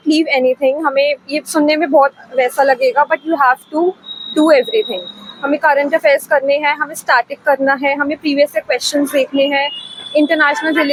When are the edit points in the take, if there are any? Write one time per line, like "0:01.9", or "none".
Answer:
none